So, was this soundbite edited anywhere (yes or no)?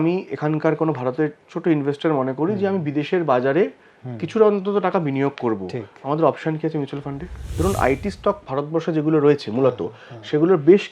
yes